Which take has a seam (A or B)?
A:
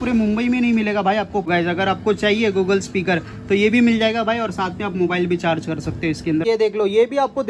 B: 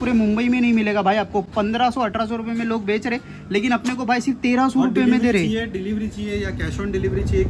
A